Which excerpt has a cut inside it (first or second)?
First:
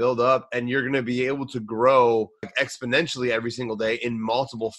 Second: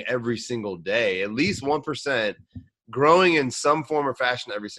first